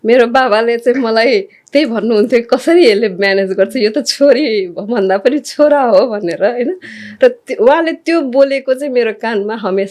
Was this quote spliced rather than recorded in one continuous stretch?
no; 0 cuts

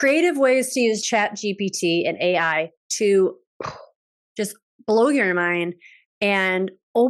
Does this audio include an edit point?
yes; 1 cut; at 1.0 s

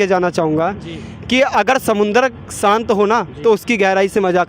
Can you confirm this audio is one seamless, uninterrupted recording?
yes; 0 cuts

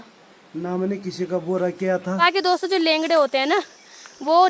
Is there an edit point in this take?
yes; 1 cut; at 2.1 s

